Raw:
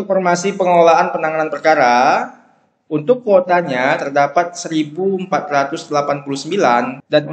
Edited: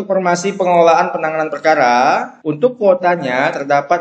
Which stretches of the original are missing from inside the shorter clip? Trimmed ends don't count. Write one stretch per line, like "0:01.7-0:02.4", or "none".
0:02.4-0:02.8